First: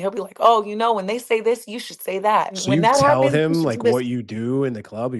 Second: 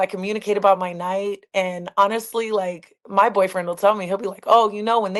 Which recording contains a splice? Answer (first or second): first